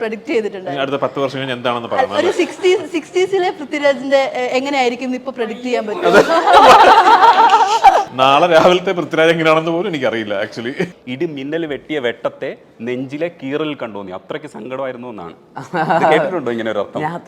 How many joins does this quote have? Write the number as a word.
two